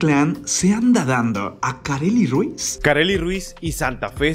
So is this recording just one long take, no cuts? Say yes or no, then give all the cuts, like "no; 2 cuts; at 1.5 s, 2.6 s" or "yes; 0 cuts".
no; 1 cut; at 2.7 s